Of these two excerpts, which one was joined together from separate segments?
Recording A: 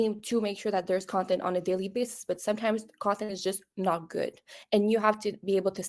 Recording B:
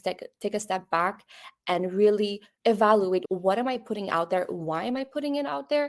B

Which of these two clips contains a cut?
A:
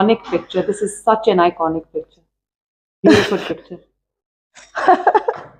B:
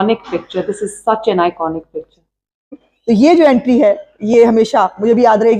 B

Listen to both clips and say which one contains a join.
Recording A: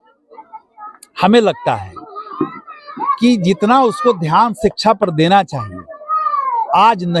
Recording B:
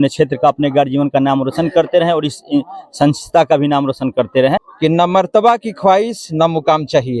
B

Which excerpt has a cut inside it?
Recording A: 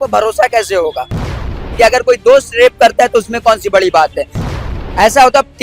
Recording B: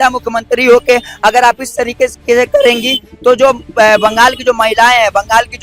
A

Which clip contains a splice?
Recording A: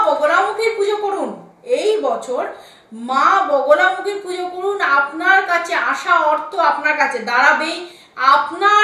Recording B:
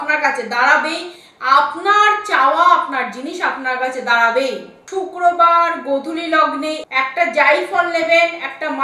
B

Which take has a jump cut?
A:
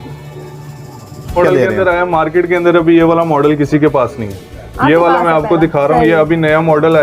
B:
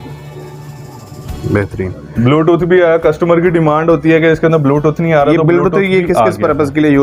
A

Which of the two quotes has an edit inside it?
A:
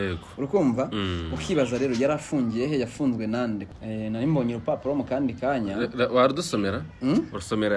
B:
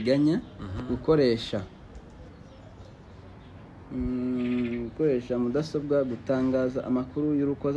A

